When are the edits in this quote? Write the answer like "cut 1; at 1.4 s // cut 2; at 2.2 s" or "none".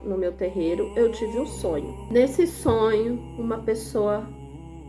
cut 1; at 2.0 s